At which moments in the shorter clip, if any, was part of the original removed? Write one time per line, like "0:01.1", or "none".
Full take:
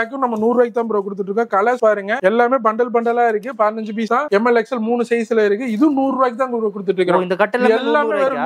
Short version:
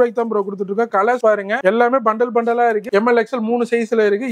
0:02.9

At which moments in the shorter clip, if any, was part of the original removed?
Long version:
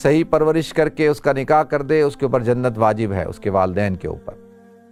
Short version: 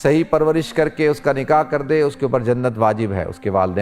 none

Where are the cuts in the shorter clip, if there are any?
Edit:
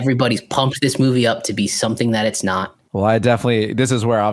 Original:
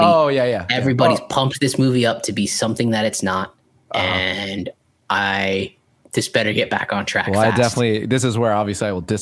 0:02.8

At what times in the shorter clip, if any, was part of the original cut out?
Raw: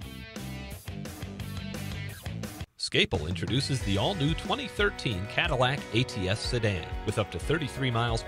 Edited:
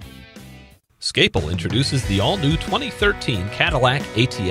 0:01.0

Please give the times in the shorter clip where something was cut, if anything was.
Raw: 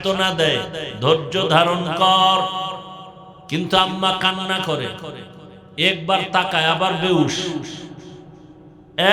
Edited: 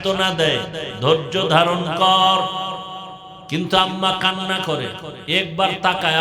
0:05.1

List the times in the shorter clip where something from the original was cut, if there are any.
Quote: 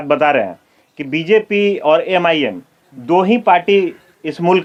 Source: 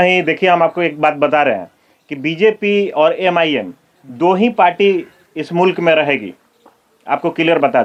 none

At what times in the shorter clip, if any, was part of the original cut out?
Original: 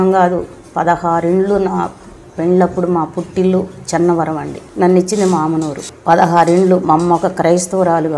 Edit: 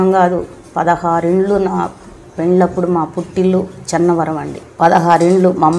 0:04.6

